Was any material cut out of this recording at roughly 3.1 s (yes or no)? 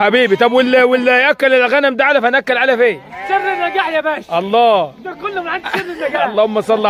no